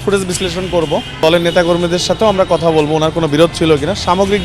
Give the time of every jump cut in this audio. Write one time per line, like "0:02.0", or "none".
0:01.2